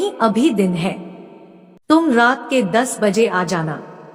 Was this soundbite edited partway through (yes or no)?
yes